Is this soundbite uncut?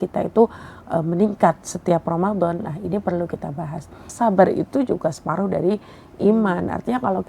no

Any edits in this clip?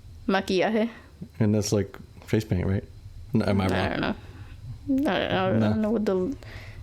no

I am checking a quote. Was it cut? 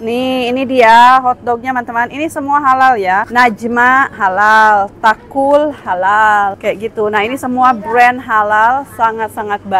yes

